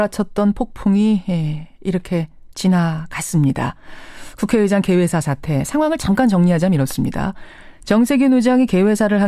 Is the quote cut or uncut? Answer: cut